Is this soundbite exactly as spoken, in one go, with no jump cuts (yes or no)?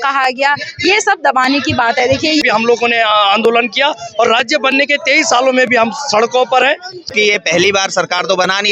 no